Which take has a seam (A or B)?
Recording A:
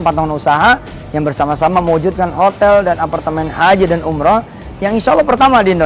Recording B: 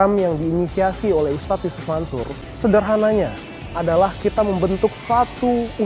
B